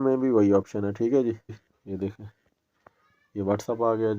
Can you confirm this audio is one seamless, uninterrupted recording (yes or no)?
no